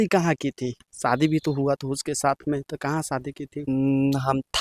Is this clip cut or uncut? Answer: uncut